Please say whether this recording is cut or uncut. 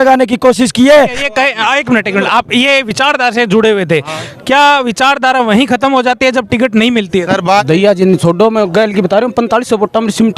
cut